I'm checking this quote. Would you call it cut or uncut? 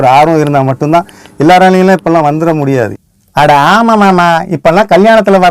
cut